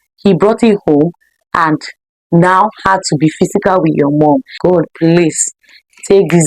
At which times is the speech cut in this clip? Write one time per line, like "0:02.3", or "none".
0:04.5